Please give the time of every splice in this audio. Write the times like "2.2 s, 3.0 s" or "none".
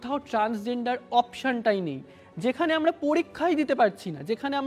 none